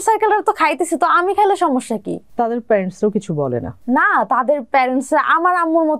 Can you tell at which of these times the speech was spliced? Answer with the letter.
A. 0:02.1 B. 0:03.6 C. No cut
C